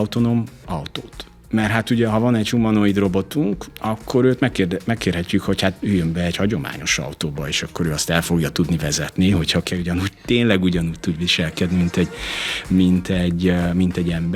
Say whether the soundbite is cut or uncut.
uncut